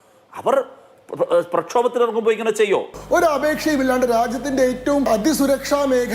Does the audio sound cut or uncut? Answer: cut